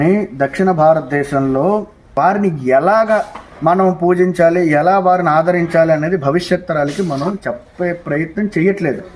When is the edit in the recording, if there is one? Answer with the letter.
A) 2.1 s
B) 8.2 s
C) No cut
A